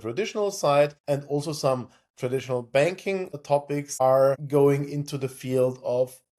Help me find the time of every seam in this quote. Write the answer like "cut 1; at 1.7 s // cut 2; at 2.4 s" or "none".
none